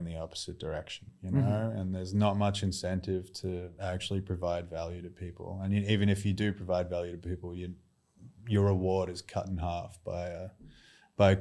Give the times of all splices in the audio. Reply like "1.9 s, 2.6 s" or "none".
1.1 s